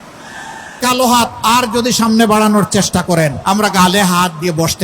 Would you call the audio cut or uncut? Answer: cut